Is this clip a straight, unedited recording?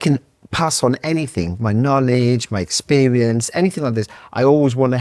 yes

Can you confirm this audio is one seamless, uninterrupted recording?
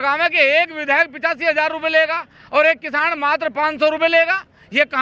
yes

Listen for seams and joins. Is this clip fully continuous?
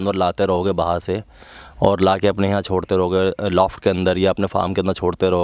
yes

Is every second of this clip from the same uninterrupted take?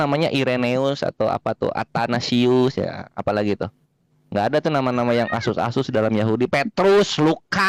yes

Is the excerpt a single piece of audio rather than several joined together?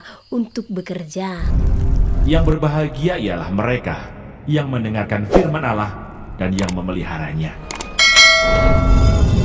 no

